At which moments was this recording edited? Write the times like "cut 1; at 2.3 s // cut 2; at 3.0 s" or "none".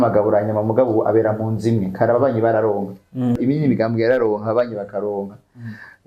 cut 1; at 3.4 s